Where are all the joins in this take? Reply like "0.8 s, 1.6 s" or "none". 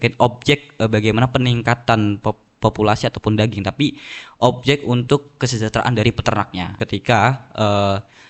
6.8 s